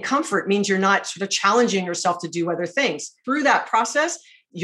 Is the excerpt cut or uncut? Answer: cut